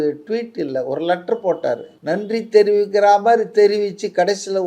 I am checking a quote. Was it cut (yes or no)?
yes